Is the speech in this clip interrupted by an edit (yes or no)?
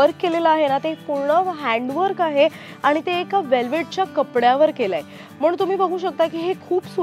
no